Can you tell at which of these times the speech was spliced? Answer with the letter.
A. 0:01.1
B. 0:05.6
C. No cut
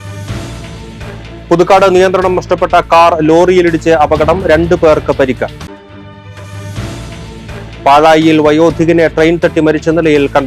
A